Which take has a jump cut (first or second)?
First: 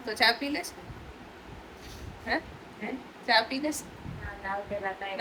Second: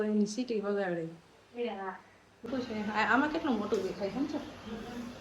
second